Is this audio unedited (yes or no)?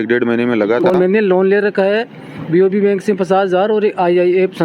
no